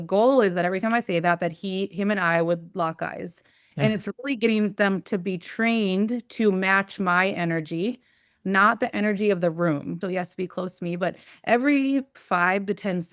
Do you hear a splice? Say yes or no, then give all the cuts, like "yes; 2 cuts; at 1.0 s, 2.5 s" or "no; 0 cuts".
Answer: yes; 2 cuts; at 10.0 s, 12.2 s